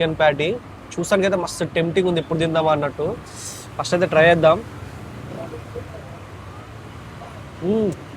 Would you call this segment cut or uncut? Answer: uncut